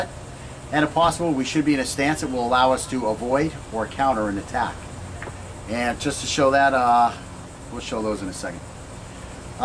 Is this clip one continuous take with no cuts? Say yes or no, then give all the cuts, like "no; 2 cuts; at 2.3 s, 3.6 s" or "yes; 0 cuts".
no; 1 cut; at 4.8 s